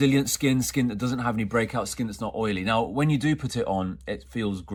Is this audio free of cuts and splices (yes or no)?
yes